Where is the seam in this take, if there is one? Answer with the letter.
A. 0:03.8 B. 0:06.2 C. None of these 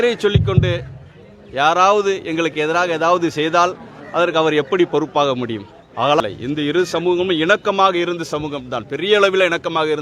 B